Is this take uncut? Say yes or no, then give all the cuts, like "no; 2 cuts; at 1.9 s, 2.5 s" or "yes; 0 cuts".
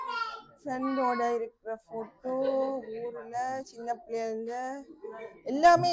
yes; 0 cuts